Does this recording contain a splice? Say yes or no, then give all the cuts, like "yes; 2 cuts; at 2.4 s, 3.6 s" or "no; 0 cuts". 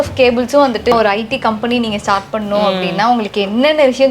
yes; 1 cut; at 0.9 s